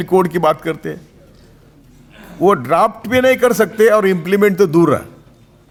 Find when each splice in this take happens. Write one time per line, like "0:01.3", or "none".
none